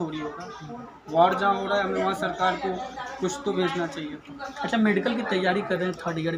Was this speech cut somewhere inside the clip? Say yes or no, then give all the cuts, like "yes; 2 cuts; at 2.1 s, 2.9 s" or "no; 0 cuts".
no; 0 cuts